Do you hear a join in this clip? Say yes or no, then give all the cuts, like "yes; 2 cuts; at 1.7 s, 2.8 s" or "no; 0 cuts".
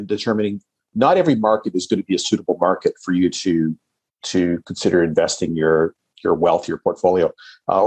no; 0 cuts